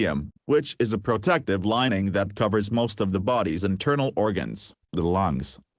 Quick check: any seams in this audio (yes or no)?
no